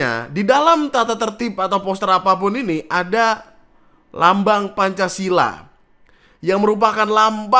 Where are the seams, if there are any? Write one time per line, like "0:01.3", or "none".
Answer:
none